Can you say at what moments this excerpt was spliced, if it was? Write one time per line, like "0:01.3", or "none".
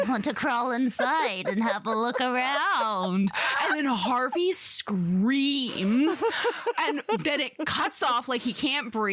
none

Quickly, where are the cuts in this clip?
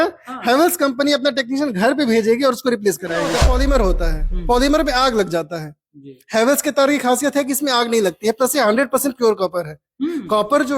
0:03.3

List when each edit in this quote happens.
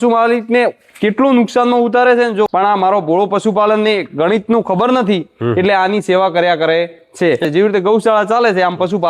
0:02.5
0:07.4

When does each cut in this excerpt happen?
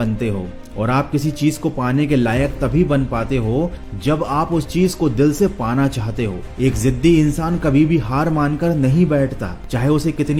none

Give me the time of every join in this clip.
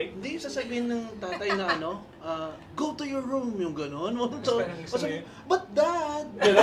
none

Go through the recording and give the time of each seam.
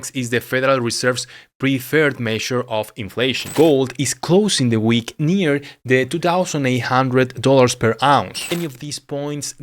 0:03.4
0:08.4

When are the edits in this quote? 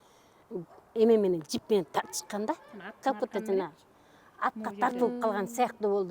none

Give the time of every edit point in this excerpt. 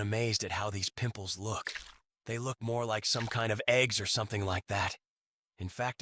none

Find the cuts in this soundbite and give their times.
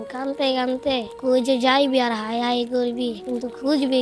0:01.1
0:03.2

